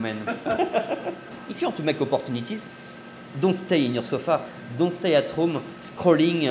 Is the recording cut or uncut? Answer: cut